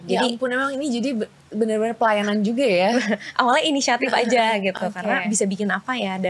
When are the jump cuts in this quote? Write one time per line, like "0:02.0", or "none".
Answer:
none